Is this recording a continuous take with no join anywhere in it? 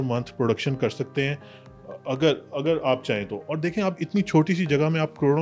yes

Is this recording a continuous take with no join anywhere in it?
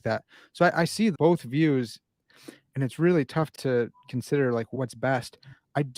no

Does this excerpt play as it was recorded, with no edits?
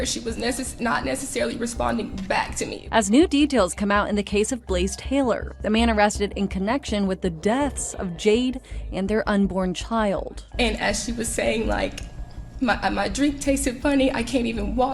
yes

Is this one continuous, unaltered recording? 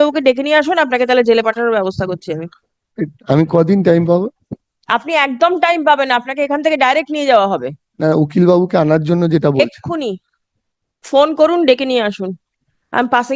yes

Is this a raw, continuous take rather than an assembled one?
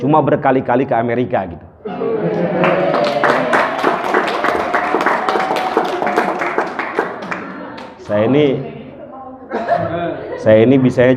yes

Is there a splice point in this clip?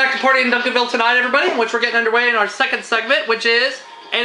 no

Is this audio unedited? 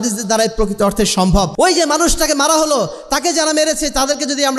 no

